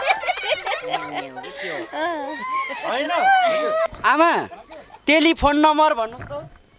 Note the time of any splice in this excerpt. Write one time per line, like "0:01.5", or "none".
0:03.9